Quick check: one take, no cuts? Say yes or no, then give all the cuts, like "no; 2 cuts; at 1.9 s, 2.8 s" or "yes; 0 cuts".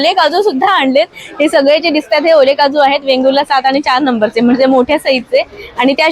yes; 0 cuts